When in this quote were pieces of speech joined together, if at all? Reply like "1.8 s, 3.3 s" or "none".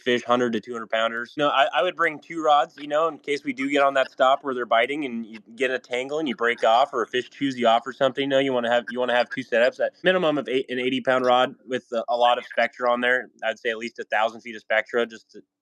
1.4 s, 10.0 s